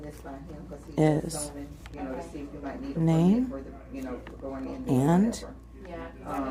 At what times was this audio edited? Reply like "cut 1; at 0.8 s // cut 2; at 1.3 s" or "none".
none

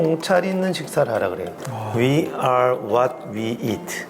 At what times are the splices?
cut 1; at 1.5 s

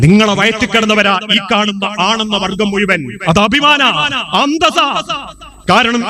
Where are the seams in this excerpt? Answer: none

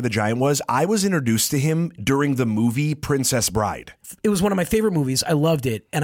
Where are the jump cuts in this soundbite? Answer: cut 1; at 3.9 s

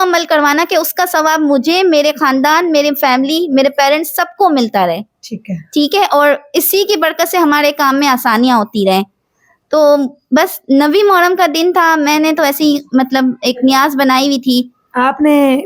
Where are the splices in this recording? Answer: none

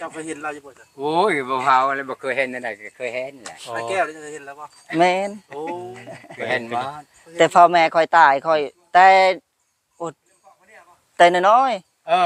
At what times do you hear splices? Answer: none

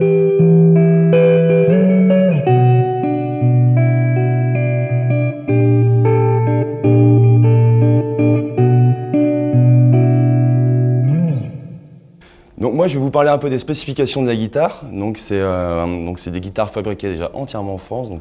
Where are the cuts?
cut 1; at 15.5 s

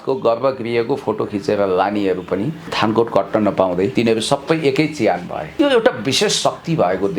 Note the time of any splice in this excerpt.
cut 1; at 2.6 s // cut 2; at 3.9 s // cut 3; at 5.4 s

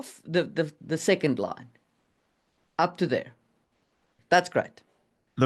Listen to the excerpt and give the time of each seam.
cut 1; at 4.1 s

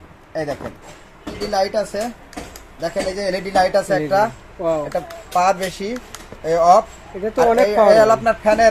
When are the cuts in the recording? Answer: cut 1; at 1.4 s

